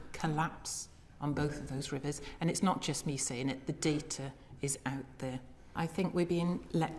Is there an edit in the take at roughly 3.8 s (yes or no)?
no